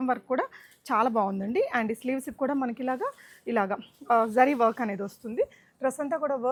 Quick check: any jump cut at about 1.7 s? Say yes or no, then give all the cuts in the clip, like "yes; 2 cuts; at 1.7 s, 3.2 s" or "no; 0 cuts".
no; 0 cuts